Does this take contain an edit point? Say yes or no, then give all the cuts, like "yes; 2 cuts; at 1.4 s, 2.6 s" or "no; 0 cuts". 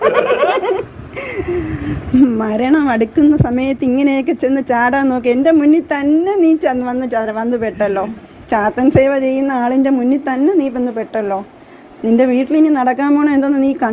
no; 0 cuts